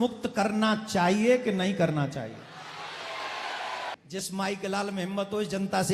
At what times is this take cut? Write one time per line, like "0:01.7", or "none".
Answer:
0:04.0